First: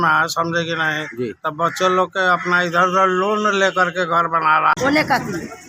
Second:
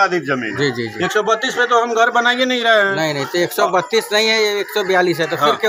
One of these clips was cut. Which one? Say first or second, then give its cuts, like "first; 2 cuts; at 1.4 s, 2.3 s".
first; 1 cut; at 4.8 s